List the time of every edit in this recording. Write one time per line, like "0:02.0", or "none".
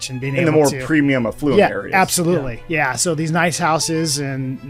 none